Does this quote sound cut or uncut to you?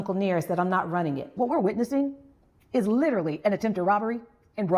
cut